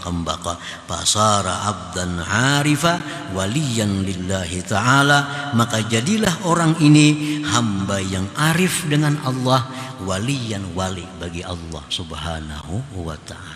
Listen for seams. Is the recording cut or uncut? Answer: uncut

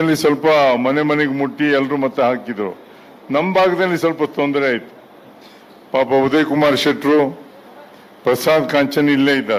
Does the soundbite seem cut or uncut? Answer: uncut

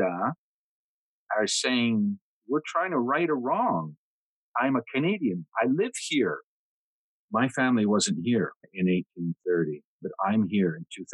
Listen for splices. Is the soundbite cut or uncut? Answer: cut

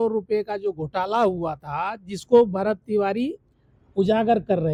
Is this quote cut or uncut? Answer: uncut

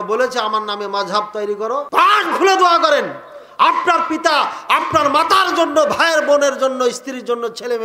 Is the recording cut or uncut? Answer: cut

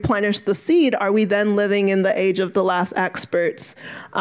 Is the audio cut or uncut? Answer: uncut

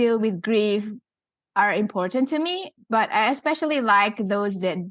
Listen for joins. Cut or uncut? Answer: uncut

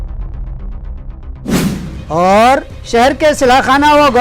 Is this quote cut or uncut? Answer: uncut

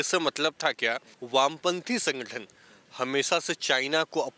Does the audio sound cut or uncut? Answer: cut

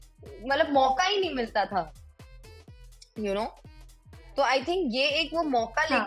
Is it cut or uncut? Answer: uncut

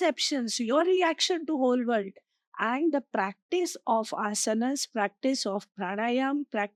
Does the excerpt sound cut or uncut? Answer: uncut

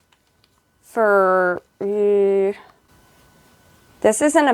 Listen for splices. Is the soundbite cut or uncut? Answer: cut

